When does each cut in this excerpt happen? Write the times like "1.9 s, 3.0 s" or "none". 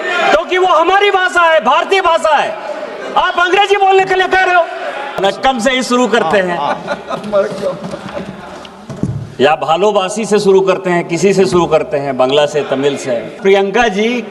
5.2 s, 13.4 s